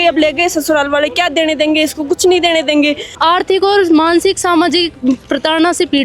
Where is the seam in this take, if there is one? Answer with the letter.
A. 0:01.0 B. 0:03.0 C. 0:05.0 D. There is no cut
B